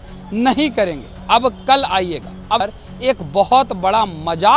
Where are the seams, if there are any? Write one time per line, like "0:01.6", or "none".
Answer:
0:02.6